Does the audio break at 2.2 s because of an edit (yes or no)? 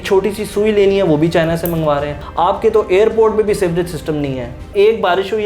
yes